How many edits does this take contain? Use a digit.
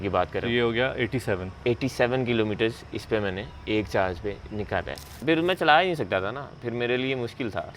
1